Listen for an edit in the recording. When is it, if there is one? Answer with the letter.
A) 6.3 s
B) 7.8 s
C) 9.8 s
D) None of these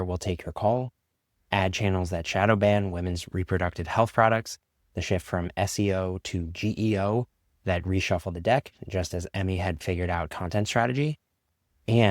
C